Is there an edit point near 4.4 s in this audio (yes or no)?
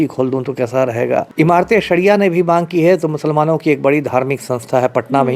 no